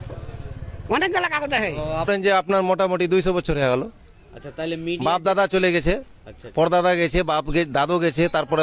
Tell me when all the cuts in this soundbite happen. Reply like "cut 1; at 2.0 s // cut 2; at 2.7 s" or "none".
cut 1; at 2.1 s